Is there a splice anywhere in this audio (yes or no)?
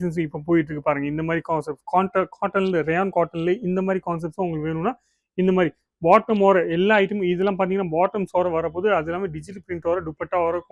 no